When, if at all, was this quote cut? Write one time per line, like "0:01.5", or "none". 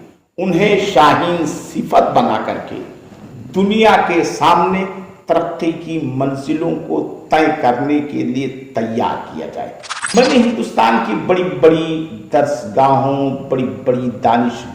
0:10.0